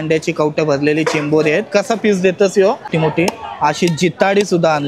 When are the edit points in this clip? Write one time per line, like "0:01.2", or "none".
0:02.8